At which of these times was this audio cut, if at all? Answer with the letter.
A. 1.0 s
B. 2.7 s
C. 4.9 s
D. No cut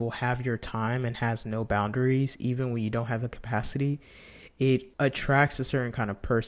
C